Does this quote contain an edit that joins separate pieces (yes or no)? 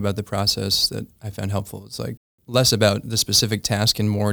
yes